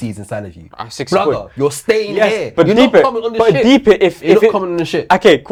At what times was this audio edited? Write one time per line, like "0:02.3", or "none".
none